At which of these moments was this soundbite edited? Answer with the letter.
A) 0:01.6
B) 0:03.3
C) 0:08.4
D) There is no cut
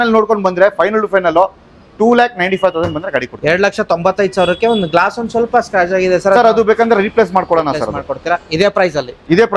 D